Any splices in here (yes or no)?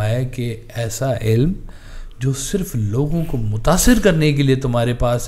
no